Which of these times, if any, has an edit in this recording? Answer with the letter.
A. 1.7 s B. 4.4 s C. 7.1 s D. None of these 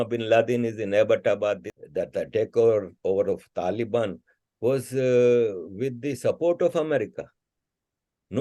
A